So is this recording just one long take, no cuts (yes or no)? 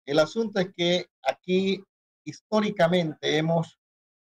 yes